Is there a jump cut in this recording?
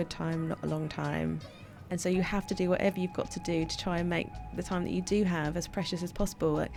no; 0 cuts

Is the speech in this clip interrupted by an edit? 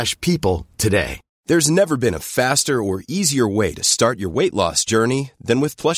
yes; 1 cut; at 1.2 s

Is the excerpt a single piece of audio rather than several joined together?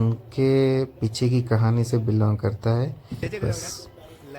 no; 1 cut; at 3.2 s

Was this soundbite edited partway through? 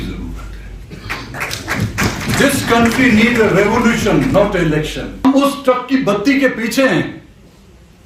yes; 1 cut; at 5.2 s

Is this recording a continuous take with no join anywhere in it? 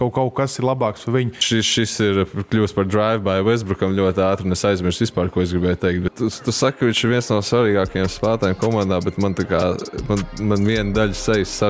no; 2 cuts; at 1.4 s, 6.1 s

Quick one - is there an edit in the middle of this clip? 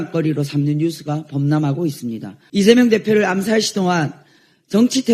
yes; 1 cut; at 2.3 s

